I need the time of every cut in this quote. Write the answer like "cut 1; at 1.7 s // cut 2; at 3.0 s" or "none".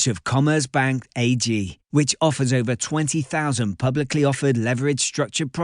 none